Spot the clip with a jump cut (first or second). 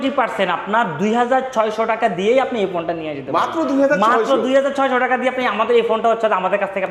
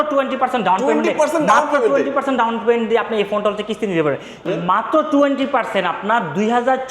second